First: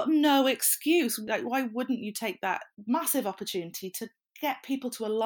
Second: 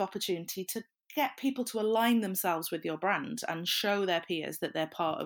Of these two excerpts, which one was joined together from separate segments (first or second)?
first